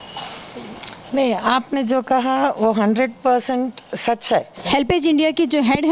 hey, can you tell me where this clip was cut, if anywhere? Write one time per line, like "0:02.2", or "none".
0:04.6